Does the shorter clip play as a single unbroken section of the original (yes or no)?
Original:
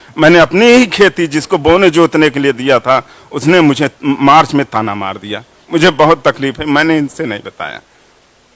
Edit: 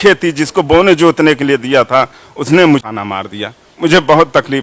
no